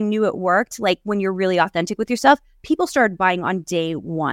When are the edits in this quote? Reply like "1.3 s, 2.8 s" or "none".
none